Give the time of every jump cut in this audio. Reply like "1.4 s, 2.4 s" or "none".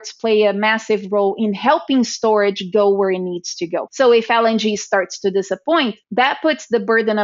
3.8 s, 6.0 s